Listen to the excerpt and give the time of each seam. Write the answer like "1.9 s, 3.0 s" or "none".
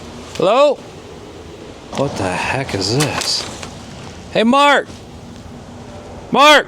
1.9 s